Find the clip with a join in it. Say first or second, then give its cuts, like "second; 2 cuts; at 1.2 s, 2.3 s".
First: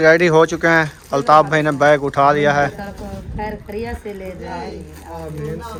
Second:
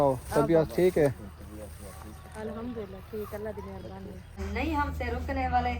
second; 1 cut; at 4.4 s